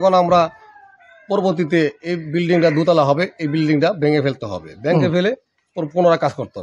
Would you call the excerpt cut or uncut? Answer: uncut